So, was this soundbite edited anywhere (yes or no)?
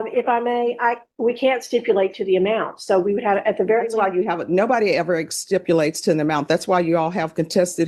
no